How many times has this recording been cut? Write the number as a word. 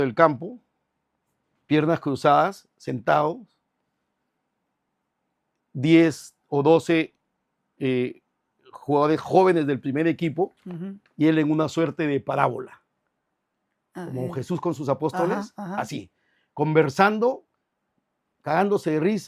zero